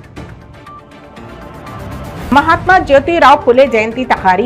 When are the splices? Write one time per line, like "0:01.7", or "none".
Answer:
0:01.3